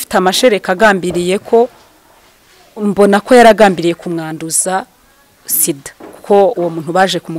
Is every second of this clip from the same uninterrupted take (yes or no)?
yes